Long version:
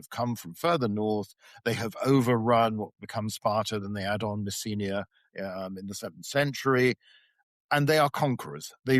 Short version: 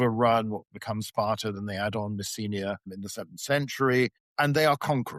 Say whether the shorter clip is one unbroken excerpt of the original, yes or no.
no